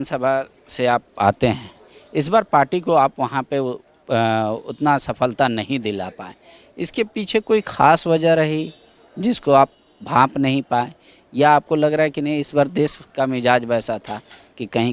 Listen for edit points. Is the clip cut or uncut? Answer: uncut